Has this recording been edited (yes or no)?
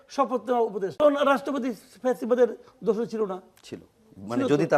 yes